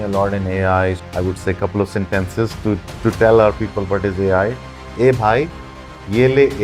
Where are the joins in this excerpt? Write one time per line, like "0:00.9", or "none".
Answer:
0:01.0